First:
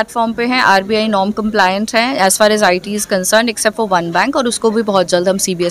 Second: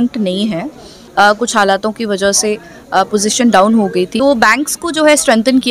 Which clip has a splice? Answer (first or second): second